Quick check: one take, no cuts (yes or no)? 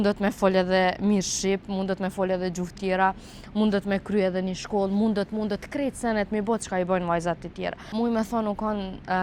no